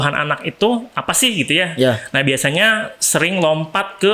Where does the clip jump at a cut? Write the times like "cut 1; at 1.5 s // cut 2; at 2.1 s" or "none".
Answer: none